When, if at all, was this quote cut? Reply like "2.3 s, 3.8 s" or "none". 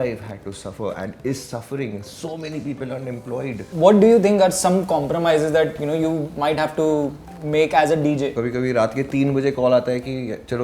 3.6 s, 8.4 s